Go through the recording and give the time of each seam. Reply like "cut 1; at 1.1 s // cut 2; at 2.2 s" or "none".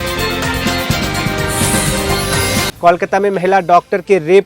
cut 1; at 2.7 s